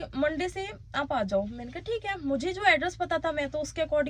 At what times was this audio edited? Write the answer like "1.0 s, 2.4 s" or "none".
none